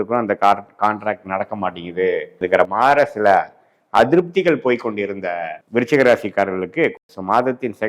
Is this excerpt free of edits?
no; 3 cuts; at 2.4 s, 5.5 s, 7.0 s

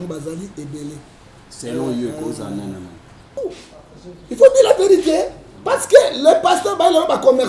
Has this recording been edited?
yes; 1 cut; at 3.4 s

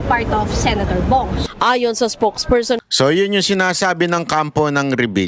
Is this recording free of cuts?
yes; 0 cuts

